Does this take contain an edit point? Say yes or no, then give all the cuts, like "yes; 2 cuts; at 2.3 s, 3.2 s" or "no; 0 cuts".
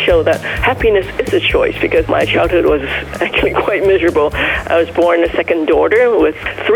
yes; 1 cut; at 2.1 s